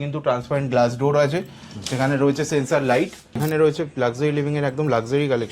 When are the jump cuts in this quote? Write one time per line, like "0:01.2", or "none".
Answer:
0:03.4